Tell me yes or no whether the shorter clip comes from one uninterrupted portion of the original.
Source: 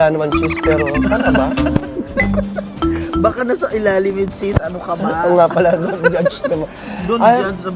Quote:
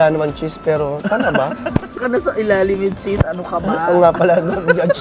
no